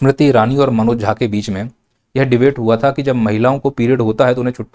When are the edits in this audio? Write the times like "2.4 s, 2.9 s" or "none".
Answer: none